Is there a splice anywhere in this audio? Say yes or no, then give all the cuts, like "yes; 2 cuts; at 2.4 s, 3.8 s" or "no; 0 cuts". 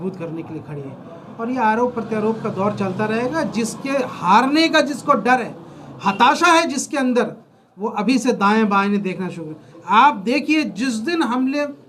no; 0 cuts